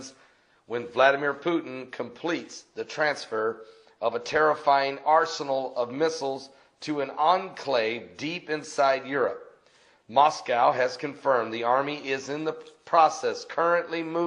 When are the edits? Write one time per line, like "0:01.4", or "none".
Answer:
0:01.8